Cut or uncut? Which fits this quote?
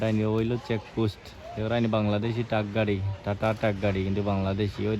uncut